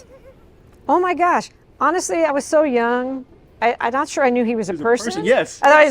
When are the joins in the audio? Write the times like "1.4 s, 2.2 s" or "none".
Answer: 2.3 s